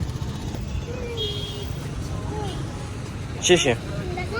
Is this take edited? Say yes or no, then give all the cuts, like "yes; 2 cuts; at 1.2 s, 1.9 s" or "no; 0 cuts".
no; 0 cuts